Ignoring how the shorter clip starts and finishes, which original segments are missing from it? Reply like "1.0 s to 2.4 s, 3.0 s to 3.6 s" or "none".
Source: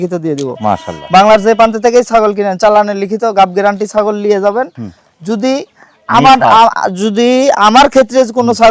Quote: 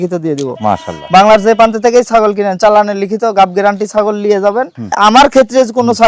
5.0 s to 7.6 s